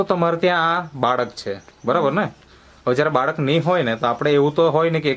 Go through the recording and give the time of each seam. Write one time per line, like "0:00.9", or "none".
none